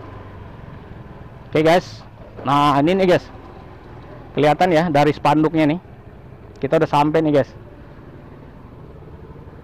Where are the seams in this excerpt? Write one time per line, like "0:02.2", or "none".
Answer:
none

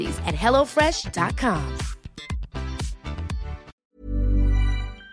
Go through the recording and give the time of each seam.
0:03.8

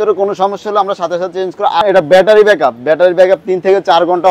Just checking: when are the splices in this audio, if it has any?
0:01.8

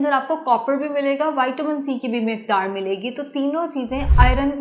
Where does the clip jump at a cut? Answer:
none

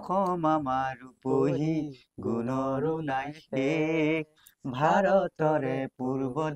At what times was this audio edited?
none

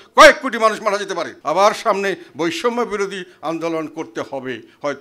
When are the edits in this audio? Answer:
0:01.3

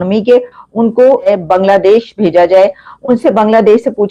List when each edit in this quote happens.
0:01.3

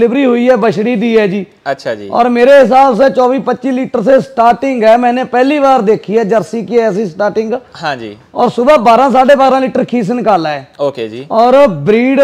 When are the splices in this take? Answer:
none

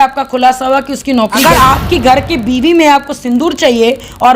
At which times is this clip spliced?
0:01.4

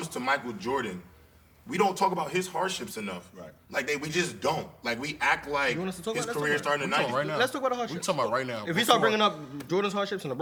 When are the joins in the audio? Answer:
none

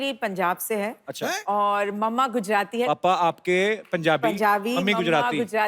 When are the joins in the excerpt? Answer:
0:02.9

